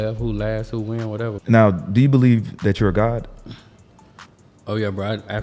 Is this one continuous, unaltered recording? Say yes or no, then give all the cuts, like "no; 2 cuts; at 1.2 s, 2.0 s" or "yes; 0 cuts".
no; 1 cut; at 1.4 s